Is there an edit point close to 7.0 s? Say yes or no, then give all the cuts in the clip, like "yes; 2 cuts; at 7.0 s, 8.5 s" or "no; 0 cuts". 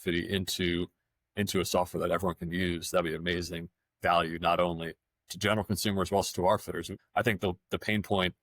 yes; 1 cut; at 7.0 s